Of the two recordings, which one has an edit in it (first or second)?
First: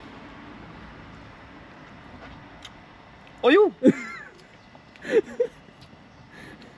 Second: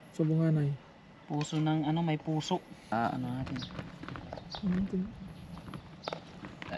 second